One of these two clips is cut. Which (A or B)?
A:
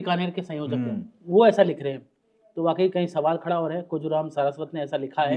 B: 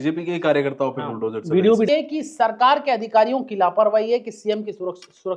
B